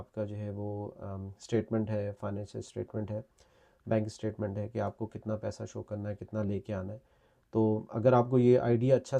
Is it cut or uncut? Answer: uncut